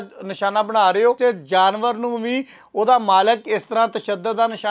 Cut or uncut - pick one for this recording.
cut